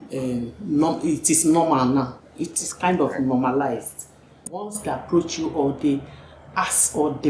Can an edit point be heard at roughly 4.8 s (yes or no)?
yes